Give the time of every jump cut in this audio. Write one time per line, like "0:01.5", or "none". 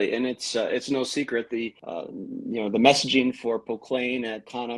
none